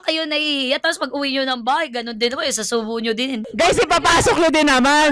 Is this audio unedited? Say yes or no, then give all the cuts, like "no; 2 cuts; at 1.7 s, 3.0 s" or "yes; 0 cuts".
no; 1 cut; at 3.5 s